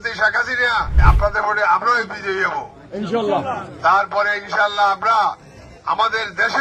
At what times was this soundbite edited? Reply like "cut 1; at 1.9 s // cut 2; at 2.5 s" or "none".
cut 1; at 0.9 s